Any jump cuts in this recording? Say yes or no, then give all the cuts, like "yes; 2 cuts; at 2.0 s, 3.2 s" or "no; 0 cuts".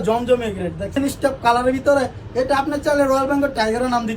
yes; 1 cut; at 0.9 s